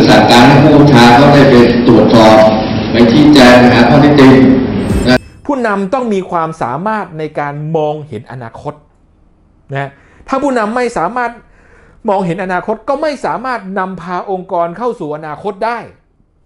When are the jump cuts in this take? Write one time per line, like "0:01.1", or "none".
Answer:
0:05.2